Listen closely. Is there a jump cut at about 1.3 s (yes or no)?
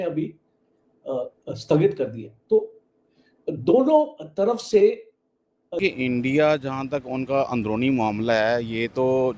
no